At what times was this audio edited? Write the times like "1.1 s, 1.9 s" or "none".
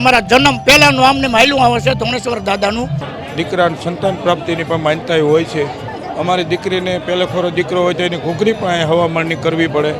3.2 s